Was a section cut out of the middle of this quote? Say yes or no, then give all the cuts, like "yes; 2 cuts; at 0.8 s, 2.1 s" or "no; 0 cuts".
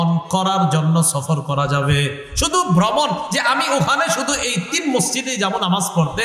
no; 0 cuts